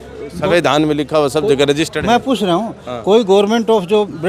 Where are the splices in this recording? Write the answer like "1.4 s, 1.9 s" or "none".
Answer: none